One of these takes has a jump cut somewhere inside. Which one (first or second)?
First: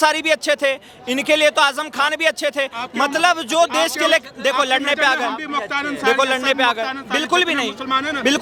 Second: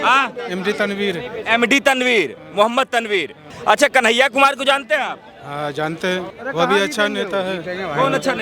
second